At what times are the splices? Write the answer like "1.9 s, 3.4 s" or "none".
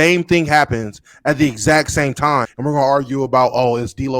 2.5 s